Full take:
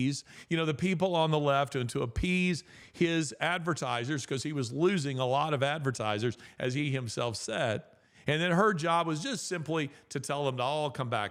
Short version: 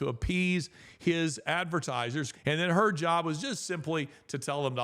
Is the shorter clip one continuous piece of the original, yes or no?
no